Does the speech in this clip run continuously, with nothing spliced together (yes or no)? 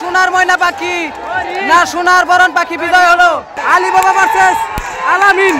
no